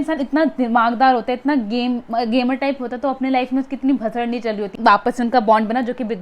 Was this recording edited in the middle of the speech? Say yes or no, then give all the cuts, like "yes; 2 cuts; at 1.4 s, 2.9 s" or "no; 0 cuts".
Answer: yes; 1 cut; at 4.7 s